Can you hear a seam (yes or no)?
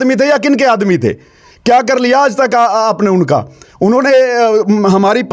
no